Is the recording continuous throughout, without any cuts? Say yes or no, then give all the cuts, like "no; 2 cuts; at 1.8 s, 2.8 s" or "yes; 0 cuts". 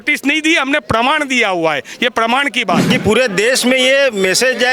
no; 1 cut; at 2.9 s